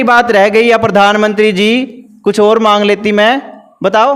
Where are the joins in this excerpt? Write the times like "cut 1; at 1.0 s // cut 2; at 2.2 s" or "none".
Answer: none